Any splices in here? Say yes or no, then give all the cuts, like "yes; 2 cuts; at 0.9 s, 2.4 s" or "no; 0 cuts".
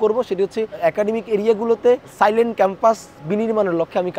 no; 0 cuts